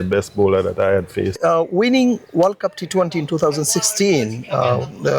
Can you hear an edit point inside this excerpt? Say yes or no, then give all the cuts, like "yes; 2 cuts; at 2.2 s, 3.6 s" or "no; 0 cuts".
yes; 1 cut; at 1.4 s